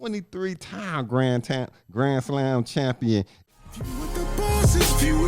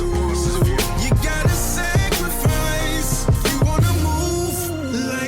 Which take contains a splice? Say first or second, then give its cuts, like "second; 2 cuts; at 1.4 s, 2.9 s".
first; 1 cut; at 3.4 s